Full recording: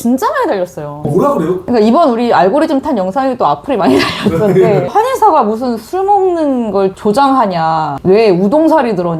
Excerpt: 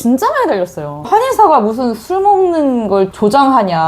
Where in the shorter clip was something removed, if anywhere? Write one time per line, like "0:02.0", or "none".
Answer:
0:01.0